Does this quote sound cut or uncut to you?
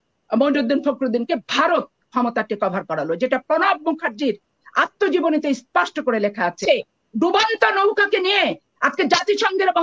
cut